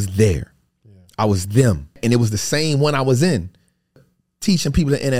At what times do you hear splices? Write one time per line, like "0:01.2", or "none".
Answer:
0:02.0
0:04.0